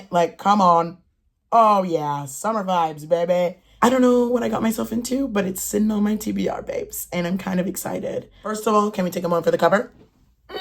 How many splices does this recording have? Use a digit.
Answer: 2